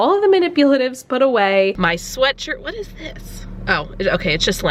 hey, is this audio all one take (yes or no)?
no